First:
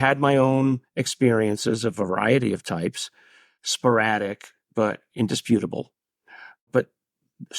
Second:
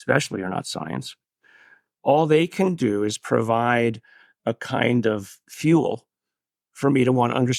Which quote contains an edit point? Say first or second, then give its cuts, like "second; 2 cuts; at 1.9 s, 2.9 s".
first; 2 cuts; at 3.5 s, 6.7 s